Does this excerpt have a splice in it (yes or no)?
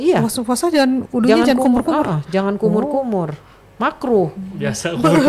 no